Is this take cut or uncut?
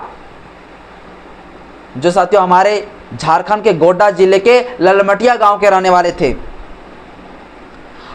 uncut